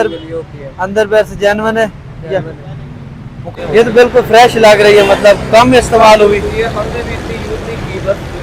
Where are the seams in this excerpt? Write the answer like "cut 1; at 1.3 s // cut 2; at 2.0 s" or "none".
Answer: cut 1; at 3.4 s